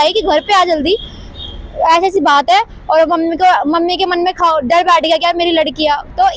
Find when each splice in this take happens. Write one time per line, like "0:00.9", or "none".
none